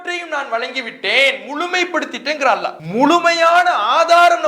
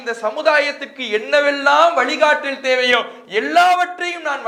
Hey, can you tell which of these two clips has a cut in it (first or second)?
first